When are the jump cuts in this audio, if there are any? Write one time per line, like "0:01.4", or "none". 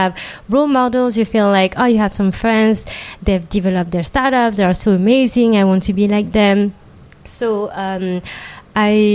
none

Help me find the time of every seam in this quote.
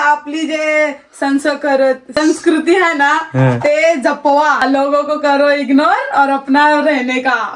0:02.1
0:04.6

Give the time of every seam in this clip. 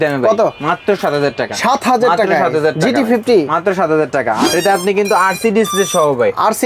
0:04.4

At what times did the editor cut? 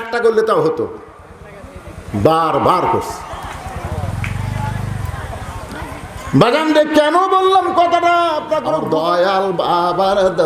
0:08.8

